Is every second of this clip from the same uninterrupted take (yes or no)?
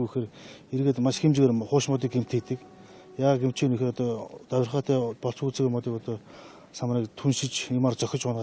yes